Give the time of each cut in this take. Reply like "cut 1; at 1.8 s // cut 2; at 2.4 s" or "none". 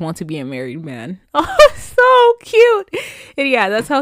none